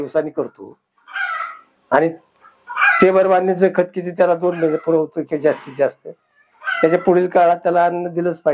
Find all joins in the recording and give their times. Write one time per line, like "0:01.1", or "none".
none